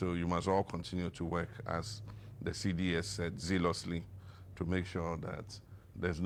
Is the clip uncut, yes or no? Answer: yes